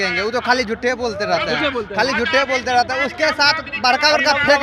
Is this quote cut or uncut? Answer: uncut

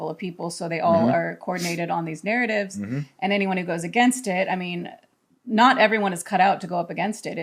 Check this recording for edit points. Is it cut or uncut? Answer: uncut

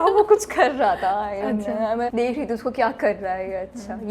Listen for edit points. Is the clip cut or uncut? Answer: cut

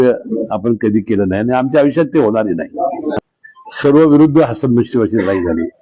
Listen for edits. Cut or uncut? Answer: cut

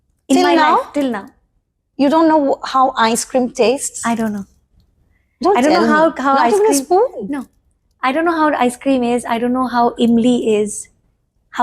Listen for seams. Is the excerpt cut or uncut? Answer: uncut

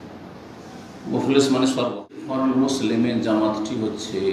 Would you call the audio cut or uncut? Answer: cut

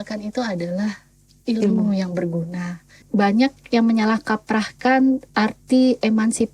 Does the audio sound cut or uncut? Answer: cut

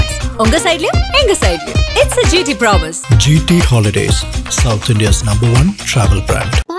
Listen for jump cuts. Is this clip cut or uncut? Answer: uncut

